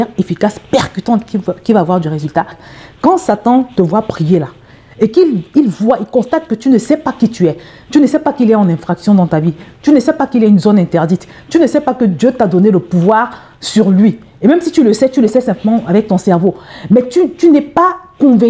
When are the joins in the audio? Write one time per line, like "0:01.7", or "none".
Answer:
0:02.6